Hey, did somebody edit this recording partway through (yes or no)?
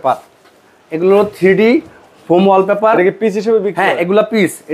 no